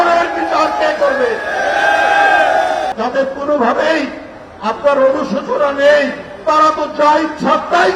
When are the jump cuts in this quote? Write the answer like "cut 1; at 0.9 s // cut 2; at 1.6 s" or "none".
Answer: cut 1; at 2.9 s

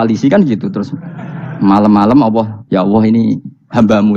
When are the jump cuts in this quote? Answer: cut 1; at 2.6 s

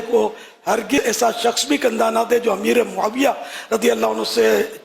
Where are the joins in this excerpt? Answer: cut 1; at 1.0 s

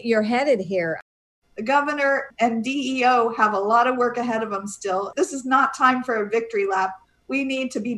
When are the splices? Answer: cut 1; at 1.0 s // cut 2; at 2.3 s // cut 3; at 5.1 s

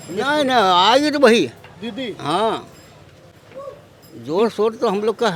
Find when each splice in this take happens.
none

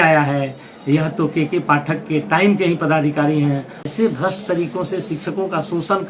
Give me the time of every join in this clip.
cut 1; at 3.8 s

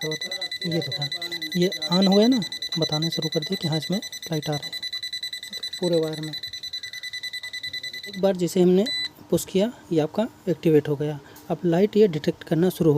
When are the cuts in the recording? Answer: cut 1; at 8.2 s

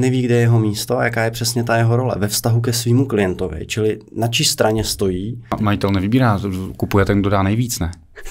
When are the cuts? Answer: cut 1; at 5.6 s

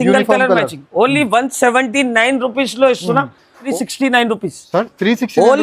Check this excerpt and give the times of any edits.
cut 1; at 3.7 s

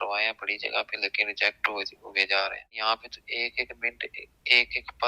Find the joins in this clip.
cut 1; at 2.7 s

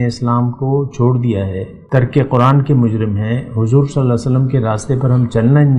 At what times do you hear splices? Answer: cut 1; at 1.7 s

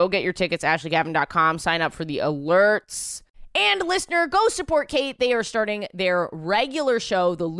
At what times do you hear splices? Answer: none

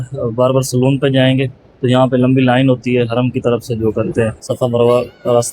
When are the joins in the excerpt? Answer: cut 1; at 4.4 s

